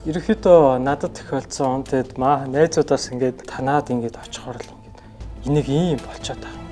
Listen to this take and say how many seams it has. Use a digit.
1